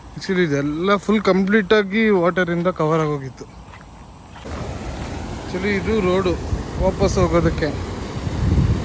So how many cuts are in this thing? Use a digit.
1